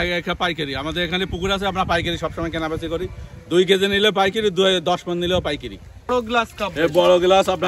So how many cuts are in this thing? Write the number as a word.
one